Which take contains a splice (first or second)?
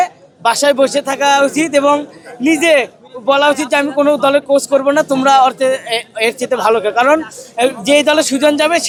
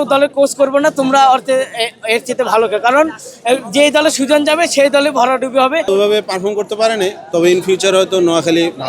second